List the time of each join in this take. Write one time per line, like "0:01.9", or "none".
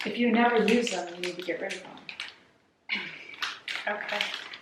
none